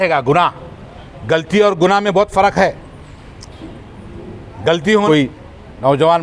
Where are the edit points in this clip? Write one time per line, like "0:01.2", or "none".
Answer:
0:05.1